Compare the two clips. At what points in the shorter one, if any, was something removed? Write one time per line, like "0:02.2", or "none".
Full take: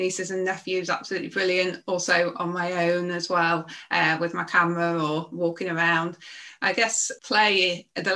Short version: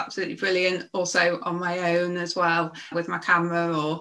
0:02.9